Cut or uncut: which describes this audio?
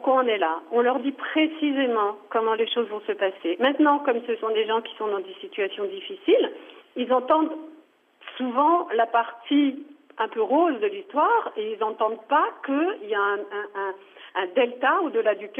uncut